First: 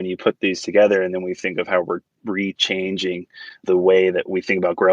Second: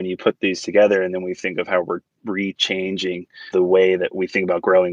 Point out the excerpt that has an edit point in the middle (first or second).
second